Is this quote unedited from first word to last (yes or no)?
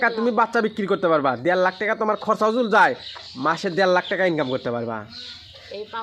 yes